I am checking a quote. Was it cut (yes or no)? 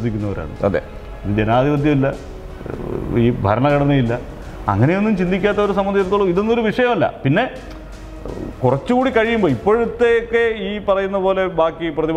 no